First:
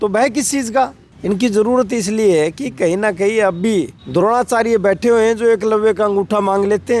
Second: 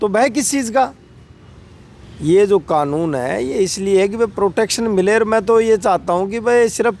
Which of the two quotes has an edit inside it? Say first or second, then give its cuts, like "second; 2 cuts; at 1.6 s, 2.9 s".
first; 2 cuts; at 1.1 s, 4.0 s